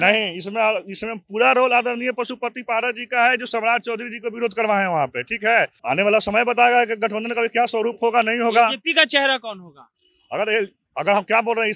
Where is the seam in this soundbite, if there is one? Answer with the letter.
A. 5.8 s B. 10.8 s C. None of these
A